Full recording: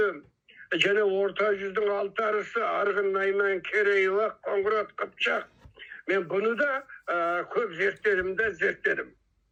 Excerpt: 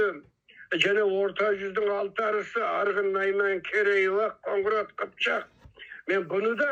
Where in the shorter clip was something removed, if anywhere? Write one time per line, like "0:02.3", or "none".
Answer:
none